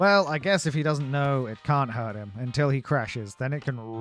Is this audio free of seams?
yes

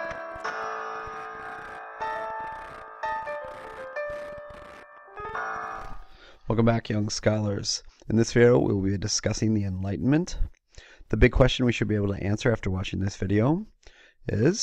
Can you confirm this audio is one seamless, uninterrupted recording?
no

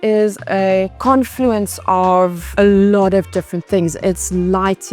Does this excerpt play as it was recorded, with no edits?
no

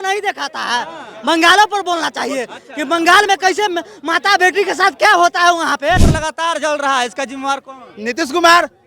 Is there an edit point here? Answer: yes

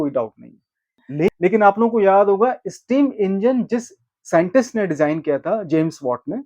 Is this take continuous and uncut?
no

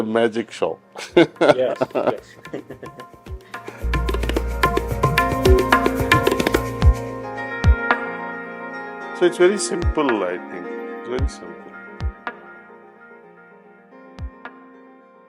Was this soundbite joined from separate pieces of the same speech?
no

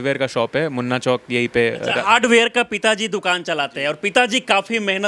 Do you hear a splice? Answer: no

